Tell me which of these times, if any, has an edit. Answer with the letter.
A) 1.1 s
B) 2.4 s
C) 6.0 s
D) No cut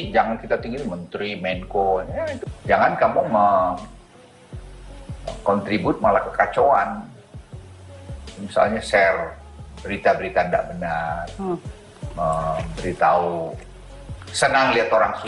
B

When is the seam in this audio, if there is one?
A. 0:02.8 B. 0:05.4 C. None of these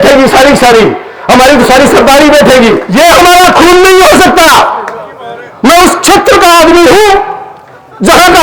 A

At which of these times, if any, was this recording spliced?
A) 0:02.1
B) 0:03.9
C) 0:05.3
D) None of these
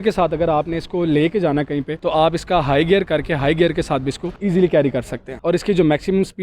C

